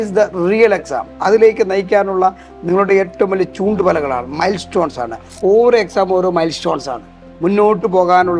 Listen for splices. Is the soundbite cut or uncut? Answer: cut